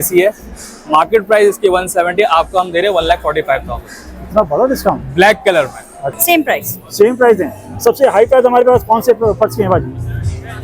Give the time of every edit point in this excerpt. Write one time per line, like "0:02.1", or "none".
0:06.0